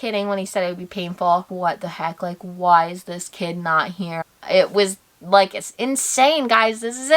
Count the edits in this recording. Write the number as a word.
two